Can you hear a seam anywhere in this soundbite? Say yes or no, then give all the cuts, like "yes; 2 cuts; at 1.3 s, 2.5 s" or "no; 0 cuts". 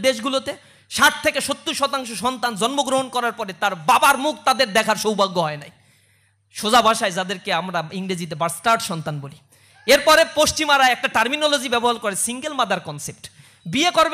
no; 0 cuts